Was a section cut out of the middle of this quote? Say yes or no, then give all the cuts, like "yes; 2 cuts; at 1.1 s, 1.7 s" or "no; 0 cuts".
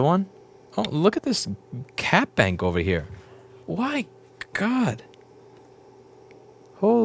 no; 0 cuts